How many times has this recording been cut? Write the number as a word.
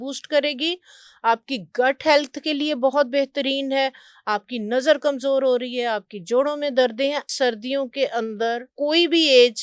two